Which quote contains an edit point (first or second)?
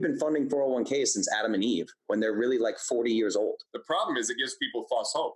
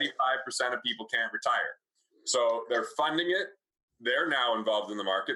first